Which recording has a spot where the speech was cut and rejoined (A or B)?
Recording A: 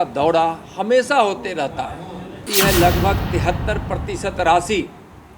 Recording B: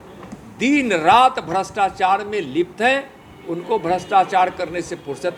A